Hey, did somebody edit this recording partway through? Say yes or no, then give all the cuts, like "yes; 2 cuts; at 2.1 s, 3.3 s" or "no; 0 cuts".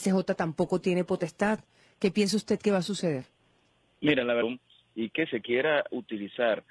no; 0 cuts